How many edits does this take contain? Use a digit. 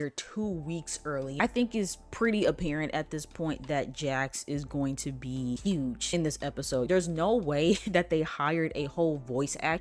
2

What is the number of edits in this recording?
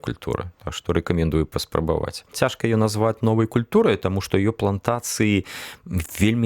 1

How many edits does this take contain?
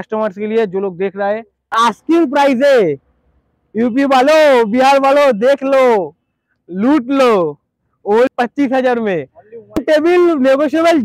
3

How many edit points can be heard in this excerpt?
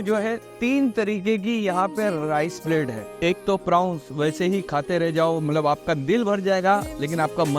1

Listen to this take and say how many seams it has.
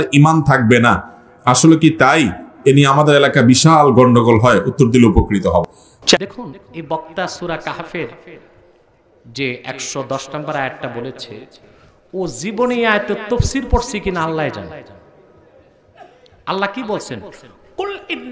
1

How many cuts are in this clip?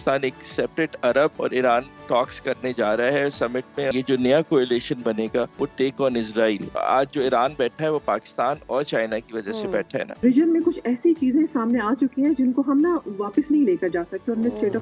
5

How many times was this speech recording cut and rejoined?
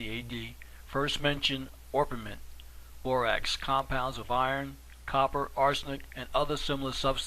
1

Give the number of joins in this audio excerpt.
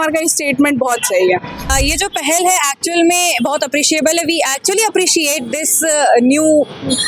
1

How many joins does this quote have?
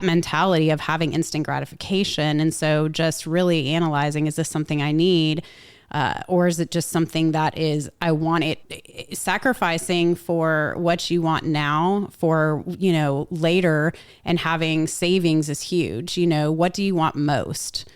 1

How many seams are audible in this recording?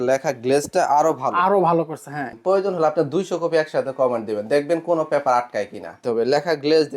2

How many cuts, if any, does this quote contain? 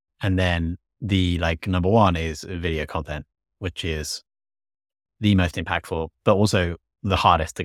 1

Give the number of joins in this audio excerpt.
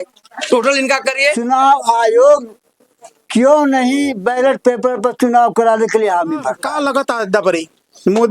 2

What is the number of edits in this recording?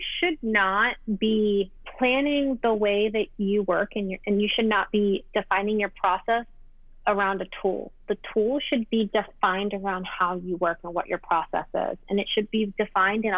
2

